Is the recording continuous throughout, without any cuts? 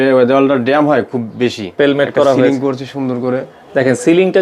no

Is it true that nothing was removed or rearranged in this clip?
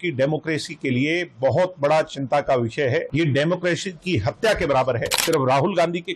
no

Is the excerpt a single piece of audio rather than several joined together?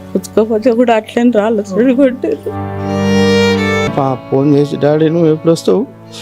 no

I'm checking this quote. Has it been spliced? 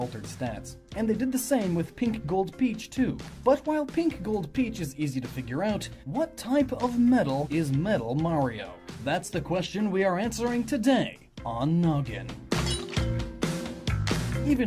yes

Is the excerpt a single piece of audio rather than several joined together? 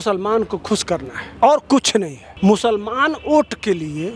no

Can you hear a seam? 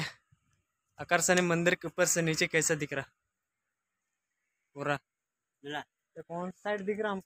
no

